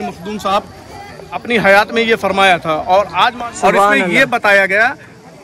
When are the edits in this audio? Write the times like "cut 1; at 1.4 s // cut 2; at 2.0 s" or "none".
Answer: cut 1; at 1.3 s // cut 2; at 3.4 s